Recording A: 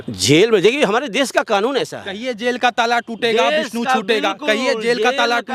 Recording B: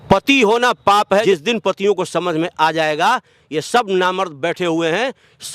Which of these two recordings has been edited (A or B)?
B